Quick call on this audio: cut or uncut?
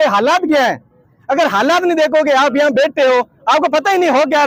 uncut